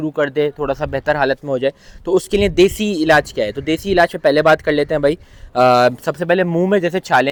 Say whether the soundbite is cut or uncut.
uncut